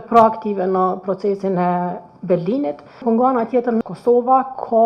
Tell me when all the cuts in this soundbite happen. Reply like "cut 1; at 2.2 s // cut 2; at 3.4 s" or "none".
cut 1; at 3.3 s